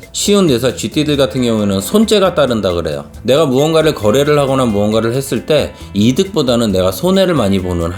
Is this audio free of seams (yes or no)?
yes